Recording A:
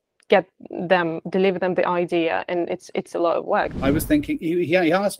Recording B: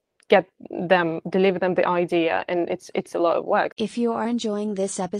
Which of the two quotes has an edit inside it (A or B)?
A